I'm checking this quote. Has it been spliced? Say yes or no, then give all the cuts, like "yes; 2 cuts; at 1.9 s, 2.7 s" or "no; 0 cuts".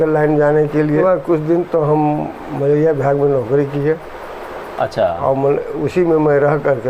yes; 1 cut; at 1.0 s